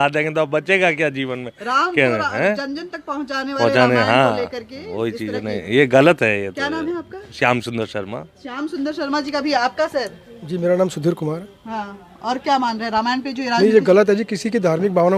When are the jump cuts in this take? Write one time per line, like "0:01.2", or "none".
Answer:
none